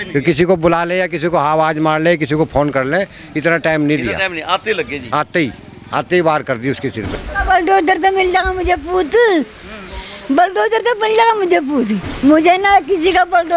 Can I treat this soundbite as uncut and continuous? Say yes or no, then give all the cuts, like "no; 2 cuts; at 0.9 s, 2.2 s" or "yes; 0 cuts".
no; 2 cuts; at 7.1 s, 12.0 s